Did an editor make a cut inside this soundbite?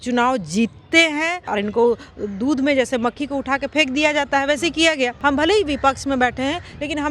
yes; 2 cuts; at 1.5 s, 5.2 s

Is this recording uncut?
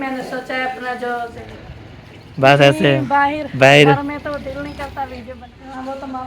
no; 2 cuts; at 1.3 s, 5.4 s

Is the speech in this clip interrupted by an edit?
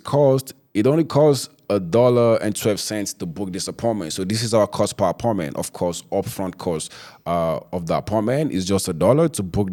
no; 0 cuts

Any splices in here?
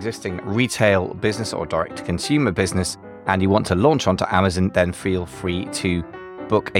no; 0 cuts

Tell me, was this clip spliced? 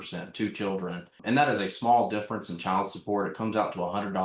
yes; 1 cut; at 1.2 s

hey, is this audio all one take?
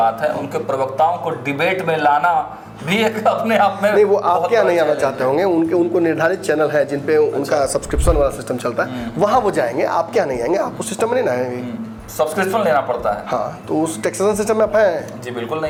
yes; 0 cuts

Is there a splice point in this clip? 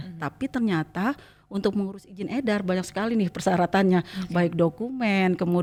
no; 0 cuts

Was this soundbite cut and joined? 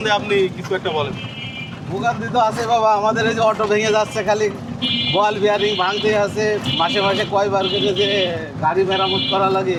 no; 0 cuts

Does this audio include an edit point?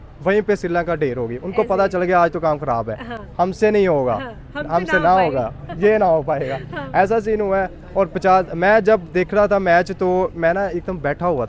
no; 0 cuts

